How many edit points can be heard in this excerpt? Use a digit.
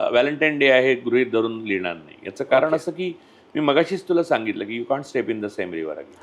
0